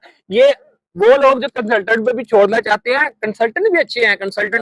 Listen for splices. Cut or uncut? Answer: uncut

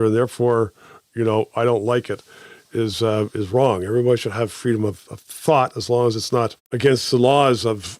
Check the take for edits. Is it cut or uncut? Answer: cut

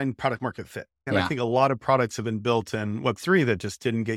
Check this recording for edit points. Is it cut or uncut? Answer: cut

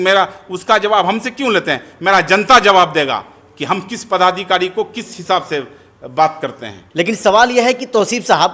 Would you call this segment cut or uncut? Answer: uncut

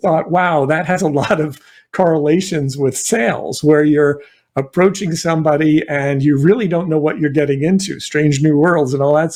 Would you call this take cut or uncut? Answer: uncut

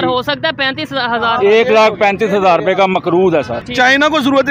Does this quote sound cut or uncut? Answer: cut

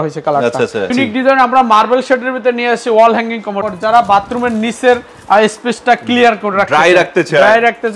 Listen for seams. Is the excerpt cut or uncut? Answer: cut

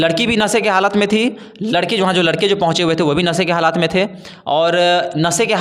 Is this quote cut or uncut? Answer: uncut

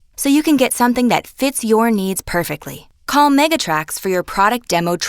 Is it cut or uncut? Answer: cut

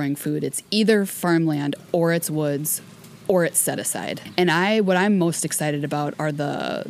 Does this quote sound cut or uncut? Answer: cut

